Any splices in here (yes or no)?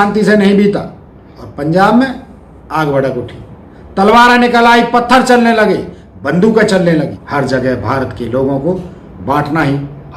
yes